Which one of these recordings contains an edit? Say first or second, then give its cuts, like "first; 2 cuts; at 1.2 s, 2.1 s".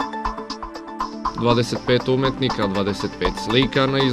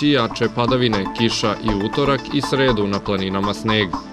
first; 1 cut; at 1.0 s